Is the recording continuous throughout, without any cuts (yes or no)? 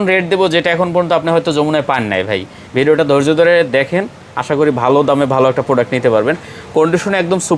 yes